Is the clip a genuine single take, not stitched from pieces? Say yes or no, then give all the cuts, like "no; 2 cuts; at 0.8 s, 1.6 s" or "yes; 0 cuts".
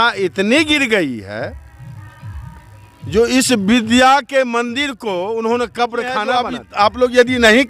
no; 1 cut; at 6.6 s